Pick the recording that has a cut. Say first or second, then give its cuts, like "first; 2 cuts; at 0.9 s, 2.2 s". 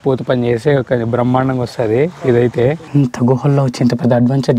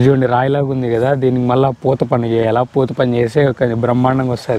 first; 1 cut; at 2.8 s